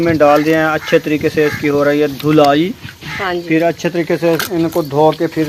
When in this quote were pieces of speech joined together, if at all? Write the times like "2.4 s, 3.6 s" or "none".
none